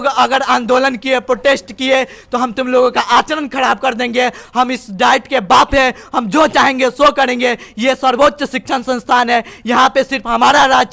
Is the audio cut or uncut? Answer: uncut